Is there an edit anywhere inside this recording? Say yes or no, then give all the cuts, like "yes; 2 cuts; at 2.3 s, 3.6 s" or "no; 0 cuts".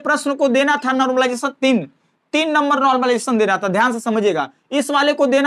no; 0 cuts